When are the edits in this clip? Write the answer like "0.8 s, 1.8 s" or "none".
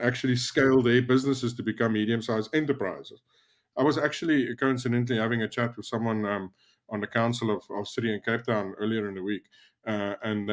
3.6 s